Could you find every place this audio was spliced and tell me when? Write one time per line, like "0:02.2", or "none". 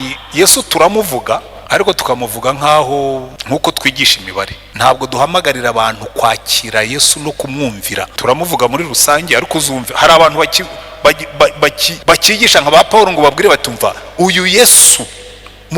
0:01.5
0:03.3
0:04.6
0:08.1
0:11.9